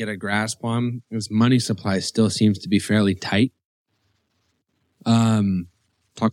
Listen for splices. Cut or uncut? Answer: uncut